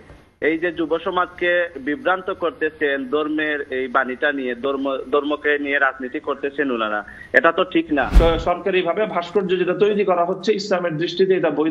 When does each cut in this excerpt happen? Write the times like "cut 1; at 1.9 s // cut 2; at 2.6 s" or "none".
cut 1; at 8.1 s